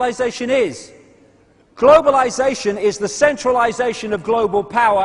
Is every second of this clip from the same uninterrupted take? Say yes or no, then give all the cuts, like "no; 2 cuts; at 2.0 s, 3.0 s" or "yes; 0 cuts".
no; 1 cut; at 1.1 s